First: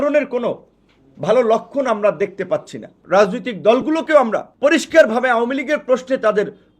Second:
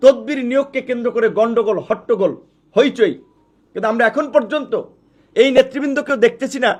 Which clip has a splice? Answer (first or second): first